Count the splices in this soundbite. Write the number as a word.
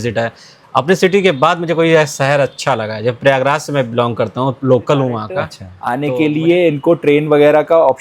one